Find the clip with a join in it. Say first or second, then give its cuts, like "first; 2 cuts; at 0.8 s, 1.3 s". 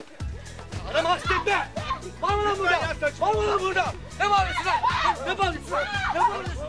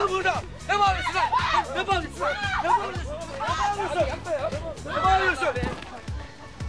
second; 1 cut; at 5.3 s